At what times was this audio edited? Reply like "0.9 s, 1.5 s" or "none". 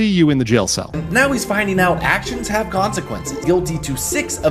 1.0 s, 3.4 s